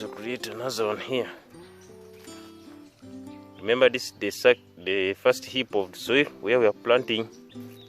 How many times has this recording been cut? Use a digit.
2